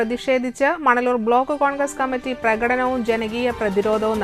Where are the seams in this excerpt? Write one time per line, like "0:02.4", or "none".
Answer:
none